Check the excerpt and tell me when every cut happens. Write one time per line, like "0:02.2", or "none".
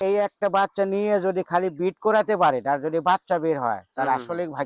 none

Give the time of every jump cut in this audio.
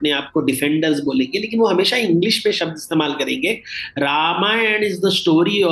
none

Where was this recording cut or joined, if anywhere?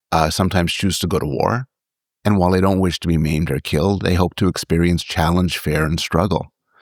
none

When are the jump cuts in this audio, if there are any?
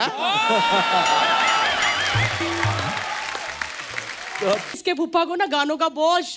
0:04.8

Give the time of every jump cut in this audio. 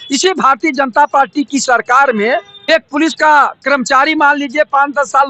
0:02.5

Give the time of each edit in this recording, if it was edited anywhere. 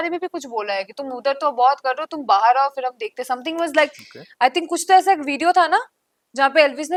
none

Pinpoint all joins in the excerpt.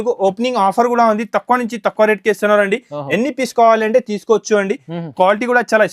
none

